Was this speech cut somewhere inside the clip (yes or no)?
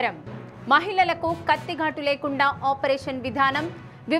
no